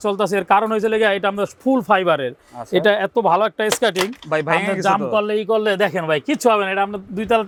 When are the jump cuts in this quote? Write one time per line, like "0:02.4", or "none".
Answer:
none